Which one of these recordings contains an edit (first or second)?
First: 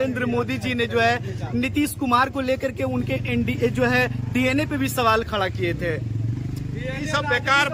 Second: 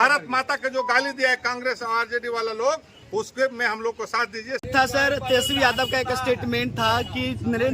second